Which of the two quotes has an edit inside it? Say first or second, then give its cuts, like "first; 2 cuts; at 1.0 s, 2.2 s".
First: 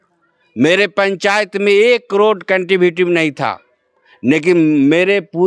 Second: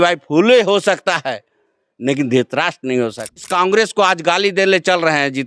second; 1 cut; at 3.5 s